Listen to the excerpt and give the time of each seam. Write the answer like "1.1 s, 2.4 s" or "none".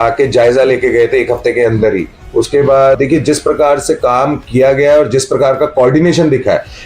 3.0 s